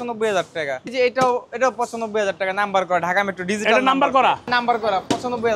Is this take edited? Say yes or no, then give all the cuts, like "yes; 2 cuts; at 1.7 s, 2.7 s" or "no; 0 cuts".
yes; 2 cuts; at 0.9 s, 4.5 s